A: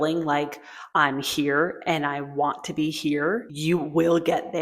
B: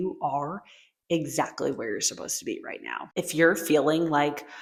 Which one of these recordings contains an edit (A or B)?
A